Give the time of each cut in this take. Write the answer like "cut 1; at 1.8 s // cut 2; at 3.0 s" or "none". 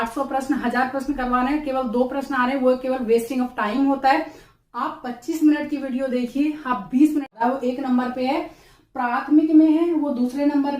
cut 1; at 7.3 s